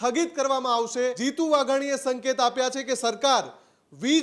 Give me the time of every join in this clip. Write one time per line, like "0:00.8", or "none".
0:01.2